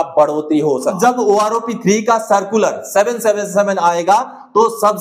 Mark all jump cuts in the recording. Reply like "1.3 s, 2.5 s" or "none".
0.9 s